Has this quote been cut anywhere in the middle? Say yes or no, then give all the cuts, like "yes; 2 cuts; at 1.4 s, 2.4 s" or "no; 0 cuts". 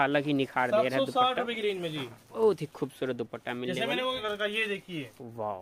yes; 1 cut; at 4.2 s